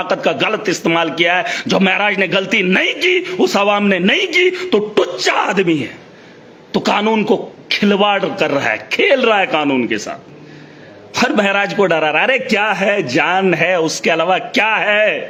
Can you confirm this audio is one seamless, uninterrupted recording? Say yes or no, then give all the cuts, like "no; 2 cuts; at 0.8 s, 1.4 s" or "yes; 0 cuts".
yes; 0 cuts